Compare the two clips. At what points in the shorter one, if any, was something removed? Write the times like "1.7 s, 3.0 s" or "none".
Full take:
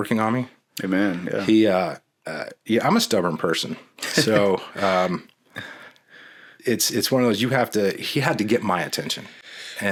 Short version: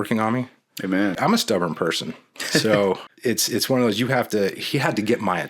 1.2 s, 3.1 s